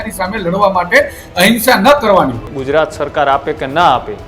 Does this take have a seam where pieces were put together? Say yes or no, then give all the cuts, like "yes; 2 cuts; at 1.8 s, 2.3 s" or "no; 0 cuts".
yes; 1 cut; at 2.5 s